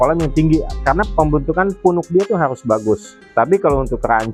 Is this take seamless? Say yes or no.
yes